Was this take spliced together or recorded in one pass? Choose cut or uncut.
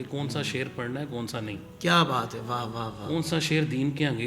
uncut